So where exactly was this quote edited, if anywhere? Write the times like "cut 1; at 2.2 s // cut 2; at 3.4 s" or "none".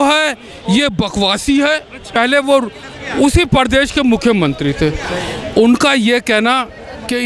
cut 1; at 2.1 s